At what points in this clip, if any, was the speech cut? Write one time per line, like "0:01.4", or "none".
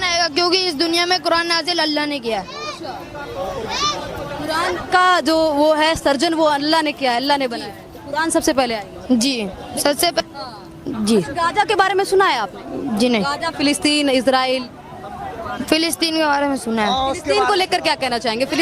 0:10.2